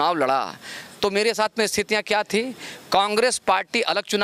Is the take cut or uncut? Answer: uncut